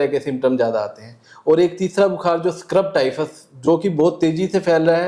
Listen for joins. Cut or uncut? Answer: uncut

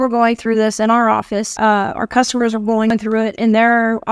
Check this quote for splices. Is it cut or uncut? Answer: cut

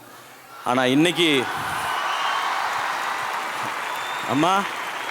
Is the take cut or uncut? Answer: uncut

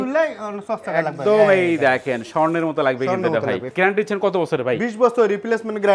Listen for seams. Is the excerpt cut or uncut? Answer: cut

